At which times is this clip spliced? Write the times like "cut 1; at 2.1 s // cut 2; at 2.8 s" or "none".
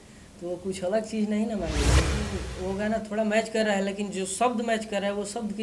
cut 1; at 2.2 s